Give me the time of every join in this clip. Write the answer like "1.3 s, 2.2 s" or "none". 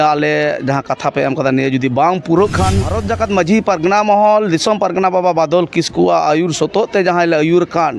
3.0 s